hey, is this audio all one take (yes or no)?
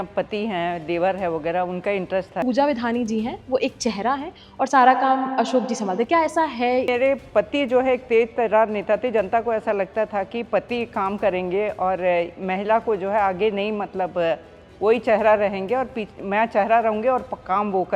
no